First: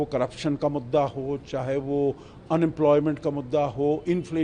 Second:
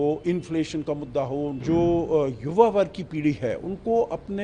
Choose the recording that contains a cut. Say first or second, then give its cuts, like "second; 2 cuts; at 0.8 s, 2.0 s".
second; 1 cut; at 1.6 s